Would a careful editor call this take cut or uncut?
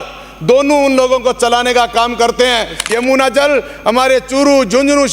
cut